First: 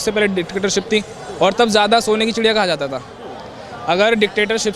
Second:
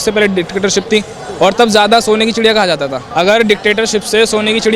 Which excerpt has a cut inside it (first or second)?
second